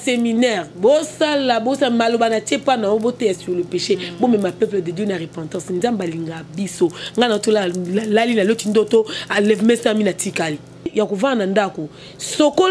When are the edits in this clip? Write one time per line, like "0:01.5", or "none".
0:10.9